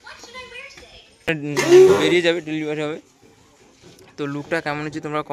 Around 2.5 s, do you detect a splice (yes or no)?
no